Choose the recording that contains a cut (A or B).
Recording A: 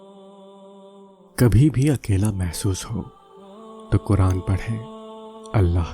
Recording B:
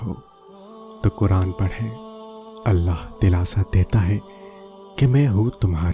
A